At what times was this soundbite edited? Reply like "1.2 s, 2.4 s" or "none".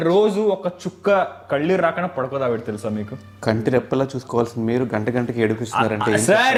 none